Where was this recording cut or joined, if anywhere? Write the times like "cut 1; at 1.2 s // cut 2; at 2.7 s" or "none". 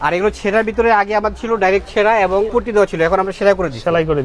cut 1; at 2.5 s